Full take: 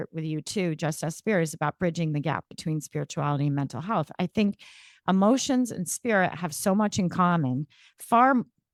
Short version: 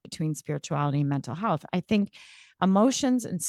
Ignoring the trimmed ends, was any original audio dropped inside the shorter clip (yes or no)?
no